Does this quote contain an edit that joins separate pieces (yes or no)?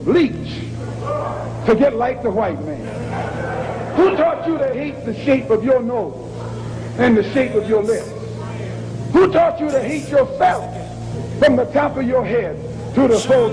no